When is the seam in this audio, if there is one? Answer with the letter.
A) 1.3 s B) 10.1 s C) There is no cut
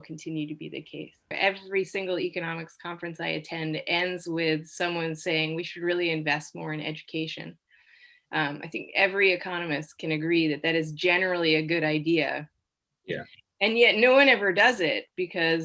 A